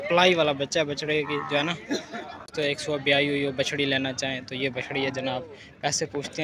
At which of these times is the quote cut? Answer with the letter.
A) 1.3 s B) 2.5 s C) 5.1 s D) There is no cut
B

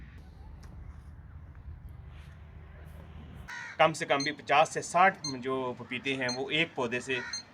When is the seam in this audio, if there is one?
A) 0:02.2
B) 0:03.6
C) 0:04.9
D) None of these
B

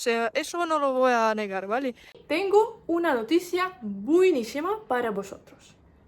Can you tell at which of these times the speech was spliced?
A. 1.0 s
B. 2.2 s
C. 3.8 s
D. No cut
B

